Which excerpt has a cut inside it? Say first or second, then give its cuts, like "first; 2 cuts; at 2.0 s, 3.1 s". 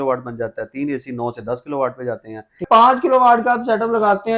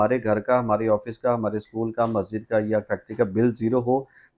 first; 1 cut; at 2.6 s